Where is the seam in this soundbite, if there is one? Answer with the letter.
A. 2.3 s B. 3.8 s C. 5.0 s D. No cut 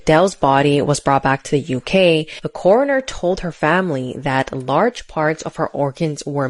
D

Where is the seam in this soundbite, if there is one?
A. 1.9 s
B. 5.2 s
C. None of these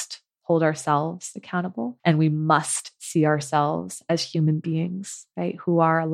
A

